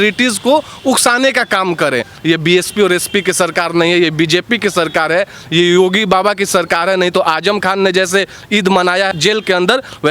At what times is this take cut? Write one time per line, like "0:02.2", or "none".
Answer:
0:02.1